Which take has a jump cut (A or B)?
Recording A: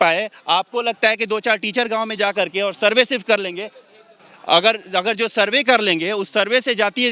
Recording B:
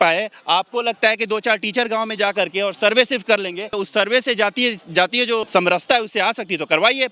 B